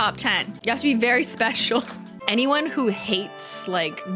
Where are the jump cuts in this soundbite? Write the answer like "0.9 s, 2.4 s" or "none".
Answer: 2.0 s